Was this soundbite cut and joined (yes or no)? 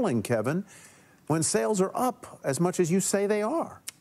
no